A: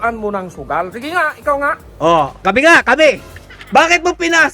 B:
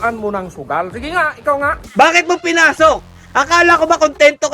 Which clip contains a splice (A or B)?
B